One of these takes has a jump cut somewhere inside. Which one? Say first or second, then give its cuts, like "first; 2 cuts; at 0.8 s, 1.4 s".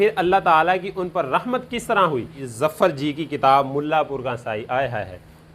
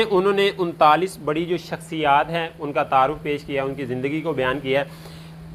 first; 1 cut; at 2.4 s